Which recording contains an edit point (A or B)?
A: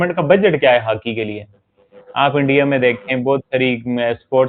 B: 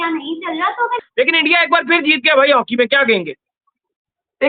B